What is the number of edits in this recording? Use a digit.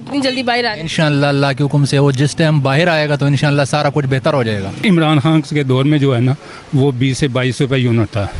1